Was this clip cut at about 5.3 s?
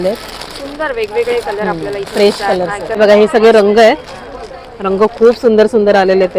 no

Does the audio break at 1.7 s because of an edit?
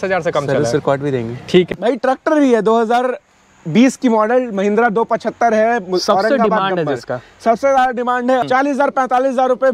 yes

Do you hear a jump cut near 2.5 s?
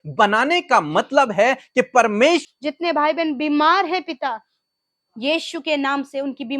yes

